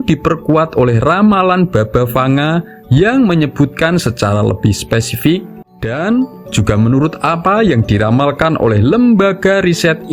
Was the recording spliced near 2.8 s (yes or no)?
no